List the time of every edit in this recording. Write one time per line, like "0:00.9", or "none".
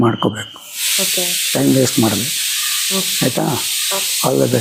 none